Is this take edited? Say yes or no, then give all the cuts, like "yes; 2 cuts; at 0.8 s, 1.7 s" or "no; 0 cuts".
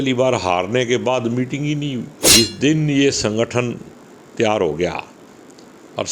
yes; 1 cut; at 2.3 s